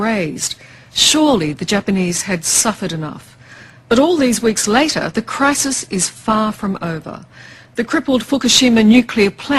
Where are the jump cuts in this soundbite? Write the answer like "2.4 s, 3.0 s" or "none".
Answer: 3.2 s